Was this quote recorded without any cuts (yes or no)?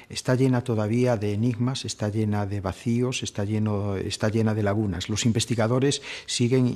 no